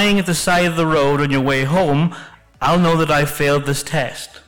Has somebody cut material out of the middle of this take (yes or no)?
no